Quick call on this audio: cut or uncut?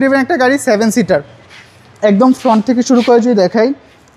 uncut